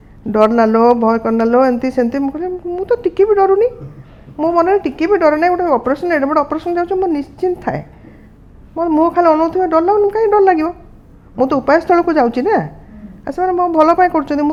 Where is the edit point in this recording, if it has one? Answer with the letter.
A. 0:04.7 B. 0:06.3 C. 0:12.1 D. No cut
D